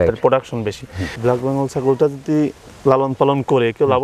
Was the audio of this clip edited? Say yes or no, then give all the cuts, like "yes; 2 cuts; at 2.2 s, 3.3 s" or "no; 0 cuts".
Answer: yes; 1 cut; at 1.1 s